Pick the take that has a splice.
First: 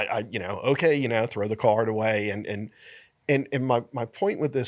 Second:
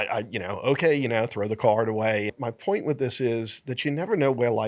second; 1 cut; at 2.4 s

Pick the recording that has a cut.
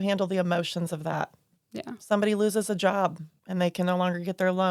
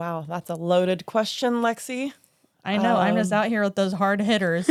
first; 1 cut; at 3.3 s

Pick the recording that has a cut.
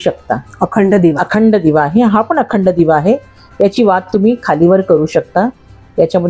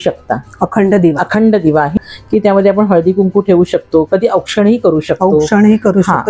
second; 1 cut; at 1.9 s

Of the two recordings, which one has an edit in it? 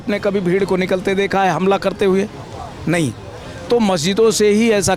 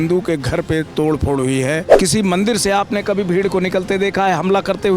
second; 1 cut; at 1.9 s

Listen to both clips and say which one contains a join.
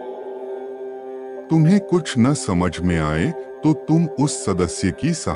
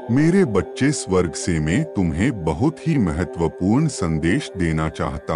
first; 1 cut; at 1.4 s

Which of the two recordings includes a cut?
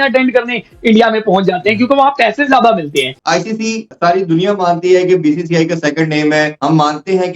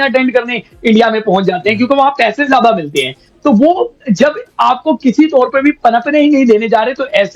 first; 2 cuts; at 3.2 s, 6.5 s

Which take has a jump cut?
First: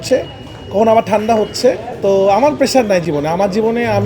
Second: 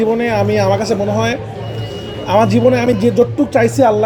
first; 1 cut; at 1.9 s

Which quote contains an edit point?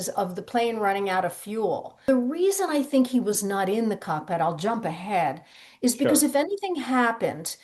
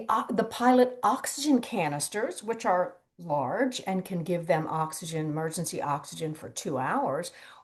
first; 1 cut; at 2.1 s

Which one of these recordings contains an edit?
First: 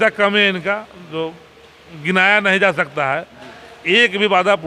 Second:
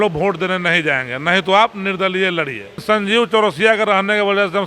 second; 1 cut; at 2.8 s

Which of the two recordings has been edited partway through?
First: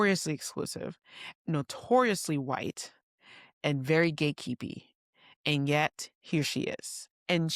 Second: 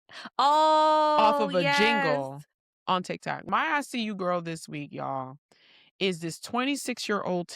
second; 1 cut; at 3.5 s

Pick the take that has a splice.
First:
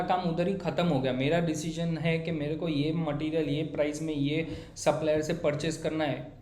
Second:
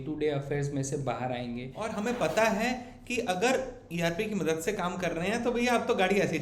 second; 1 cut; at 1.8 s

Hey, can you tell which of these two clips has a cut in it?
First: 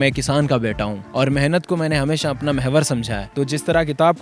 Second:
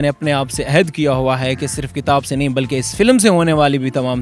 first; 2 cuts; at 1.0 s, 3.2 s

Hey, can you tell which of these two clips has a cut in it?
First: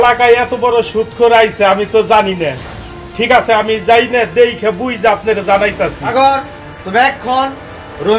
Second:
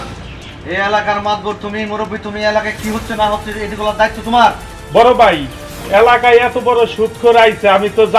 second; 1 cut; at 4.8 s

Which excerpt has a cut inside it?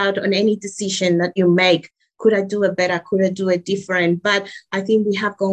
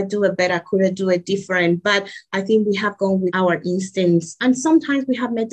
second; 1 cut; at 4.4 s

